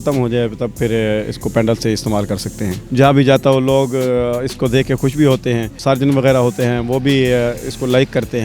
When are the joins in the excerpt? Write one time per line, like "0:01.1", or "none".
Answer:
0:02.8
0:05.8

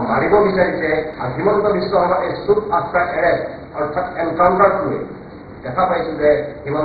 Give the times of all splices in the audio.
0:01.1

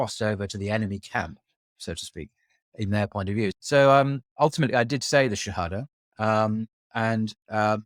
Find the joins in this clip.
0:03.6

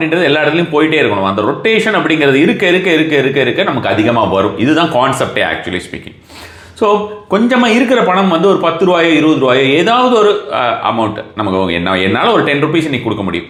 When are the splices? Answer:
none

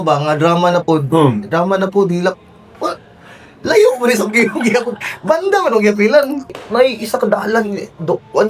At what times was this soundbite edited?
0:06.6

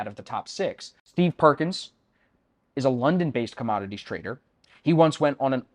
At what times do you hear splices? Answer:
0:00.9

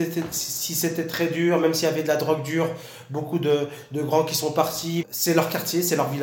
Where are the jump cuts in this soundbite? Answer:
0:05.1

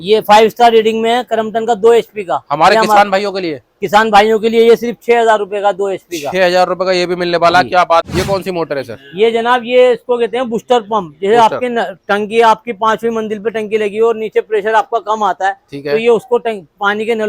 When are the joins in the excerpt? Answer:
0:08.0

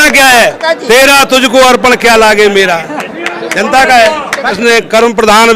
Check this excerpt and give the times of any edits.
0:04.6

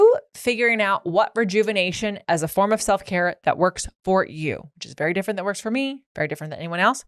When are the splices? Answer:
0:02.2

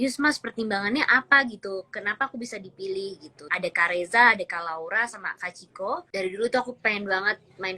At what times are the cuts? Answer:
0:03.3
0:06.1

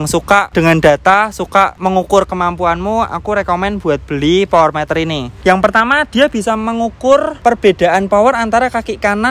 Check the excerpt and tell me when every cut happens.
0:05.4

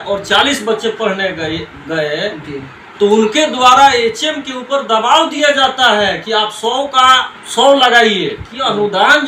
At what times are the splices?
none

